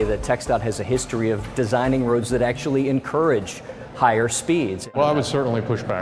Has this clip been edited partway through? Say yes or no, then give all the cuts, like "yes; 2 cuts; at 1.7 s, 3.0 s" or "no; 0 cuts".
yes; 1 cut; at 4.9 s